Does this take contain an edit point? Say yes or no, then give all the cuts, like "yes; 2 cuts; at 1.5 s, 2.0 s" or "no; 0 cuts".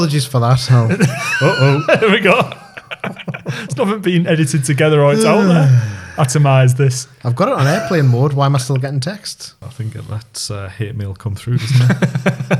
yes; 1 cut; at 9.6 s